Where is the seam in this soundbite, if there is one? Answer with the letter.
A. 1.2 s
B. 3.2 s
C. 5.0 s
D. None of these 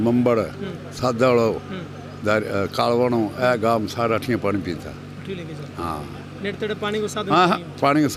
D